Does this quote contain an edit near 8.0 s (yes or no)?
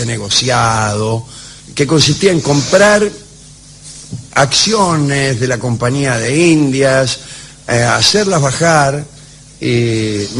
yes